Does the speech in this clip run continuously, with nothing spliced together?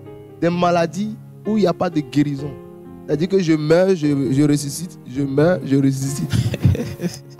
yes; 0 cuts

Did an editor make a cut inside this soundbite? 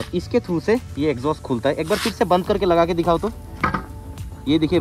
no; 0 cuts

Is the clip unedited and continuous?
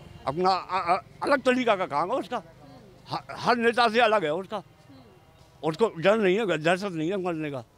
yes; 0 cuts

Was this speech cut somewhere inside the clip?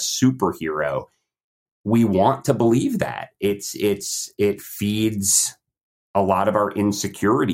no; 0 cuts

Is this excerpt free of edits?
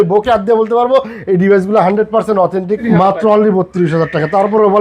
no; 1 cut; at 2.8 s

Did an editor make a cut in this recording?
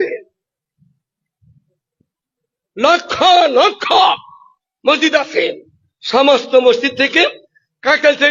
no; 0 cuts

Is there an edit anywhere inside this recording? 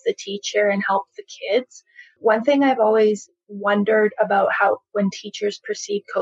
yes; 1 cut; at 2.2 s

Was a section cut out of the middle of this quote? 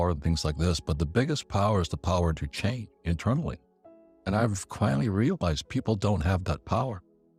no; 0 cuts

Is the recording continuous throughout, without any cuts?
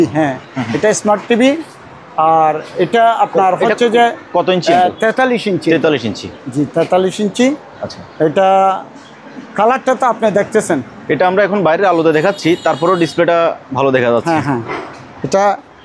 yes; 0 cuts

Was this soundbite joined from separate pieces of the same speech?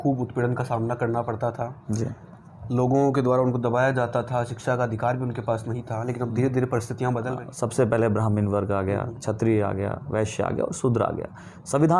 yes; 1 cut; at 7.4 s

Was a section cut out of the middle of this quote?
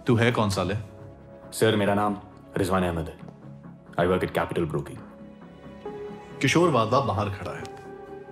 no; 0 cuts

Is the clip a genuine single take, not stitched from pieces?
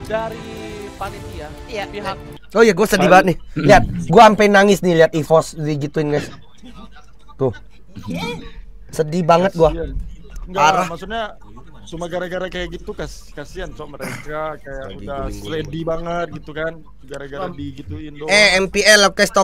no; 2 cuts; at 1.6 s, 2.3 s

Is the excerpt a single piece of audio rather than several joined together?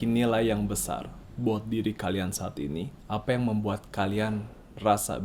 no; 2 cuts; at 1.2 s, 3.0 s

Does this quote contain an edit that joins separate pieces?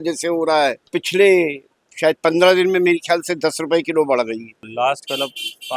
yes; 2 cuts; at 1.0 s, 4.6 s

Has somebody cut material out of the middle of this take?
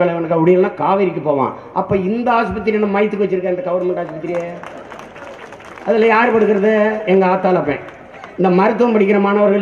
no; 0 cuts

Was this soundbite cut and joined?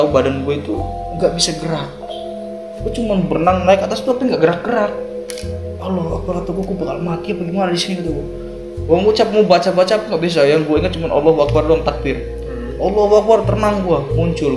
no; 0 cuts

